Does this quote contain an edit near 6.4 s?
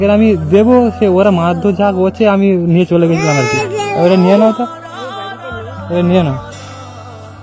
yes; 1 cut; at 6.4 s

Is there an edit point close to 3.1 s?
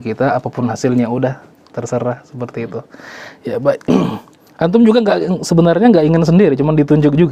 no; 0 cuts

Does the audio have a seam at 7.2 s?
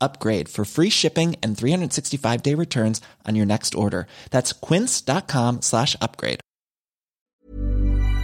yes; 1 cut; at 7.2 s

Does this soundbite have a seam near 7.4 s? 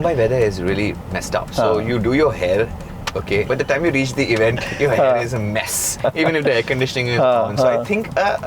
no; 3 cuts; at 1.4 s, 3.5 s, 6.0 s

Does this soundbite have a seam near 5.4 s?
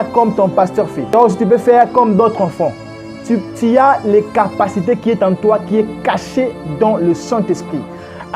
no; 1 cut; at 1.0 s

